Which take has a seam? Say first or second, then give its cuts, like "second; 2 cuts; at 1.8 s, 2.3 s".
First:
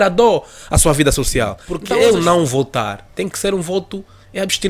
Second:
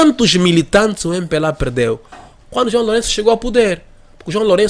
first; 1 cut; at 1.7 s